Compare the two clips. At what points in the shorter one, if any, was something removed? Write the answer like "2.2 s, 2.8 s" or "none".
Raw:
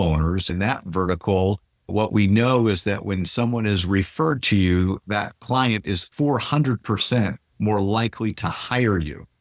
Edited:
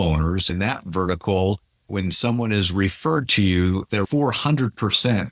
1.9 s, 3.9 s